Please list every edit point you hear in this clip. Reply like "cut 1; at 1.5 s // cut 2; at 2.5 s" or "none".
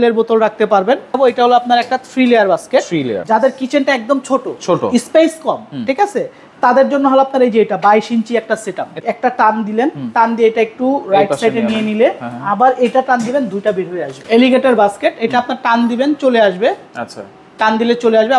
cut 1; at 1.1 s // cut 2; at 3.2 s // cut 3; at 9.0 s // cut 4; at 14.1 s